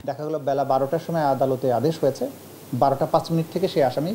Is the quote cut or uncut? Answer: uncut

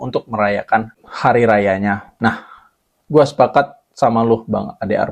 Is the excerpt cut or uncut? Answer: uncut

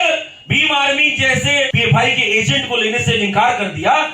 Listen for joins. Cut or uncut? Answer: cut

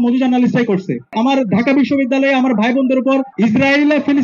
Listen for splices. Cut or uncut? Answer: cut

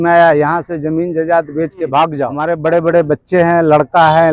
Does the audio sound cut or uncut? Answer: cut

